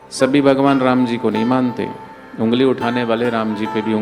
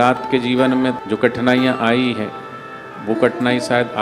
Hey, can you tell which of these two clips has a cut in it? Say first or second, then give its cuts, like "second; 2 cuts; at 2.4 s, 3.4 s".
second; 1 cut; at 1.0 s